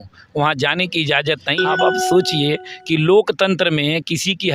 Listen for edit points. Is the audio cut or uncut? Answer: cut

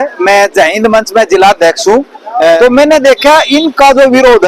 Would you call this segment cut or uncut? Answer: cut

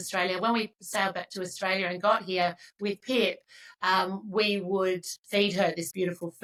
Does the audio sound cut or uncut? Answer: uncut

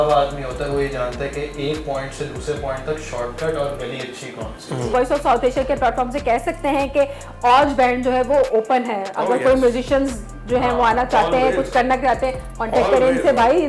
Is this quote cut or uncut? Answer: cut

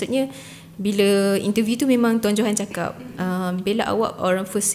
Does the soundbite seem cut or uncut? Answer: uncut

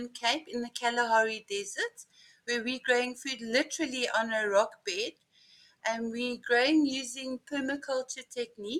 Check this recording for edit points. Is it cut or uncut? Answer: uncut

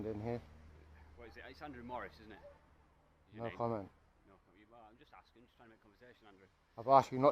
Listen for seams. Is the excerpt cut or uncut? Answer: uncut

